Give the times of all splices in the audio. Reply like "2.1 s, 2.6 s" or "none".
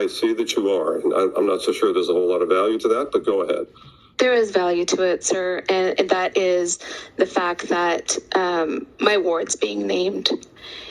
none